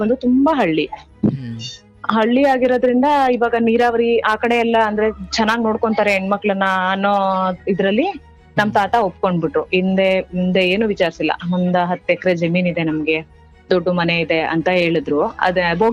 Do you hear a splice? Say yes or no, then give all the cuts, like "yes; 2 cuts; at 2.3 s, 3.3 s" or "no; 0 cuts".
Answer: no; 0 cuts